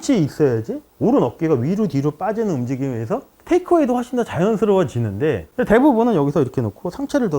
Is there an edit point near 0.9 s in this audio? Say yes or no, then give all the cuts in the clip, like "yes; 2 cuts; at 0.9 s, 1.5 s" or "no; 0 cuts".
no; 1 cut; at 5.5 s